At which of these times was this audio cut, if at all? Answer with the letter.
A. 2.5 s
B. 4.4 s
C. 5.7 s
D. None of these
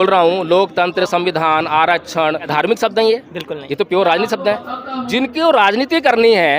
A